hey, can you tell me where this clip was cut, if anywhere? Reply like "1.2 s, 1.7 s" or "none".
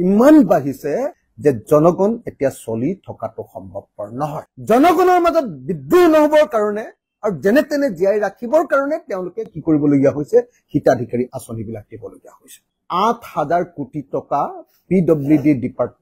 12.7 s